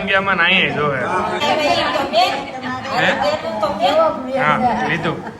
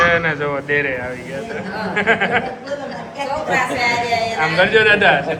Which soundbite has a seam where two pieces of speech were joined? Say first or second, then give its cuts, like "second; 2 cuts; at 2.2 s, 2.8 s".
first; 1 cut; at 1.4 s